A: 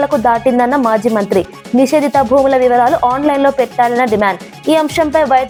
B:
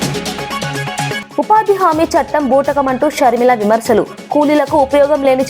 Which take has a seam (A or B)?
B